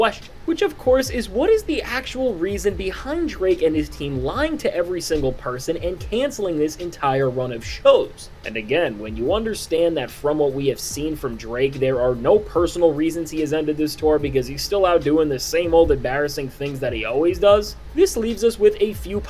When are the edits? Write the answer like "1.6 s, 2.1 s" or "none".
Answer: none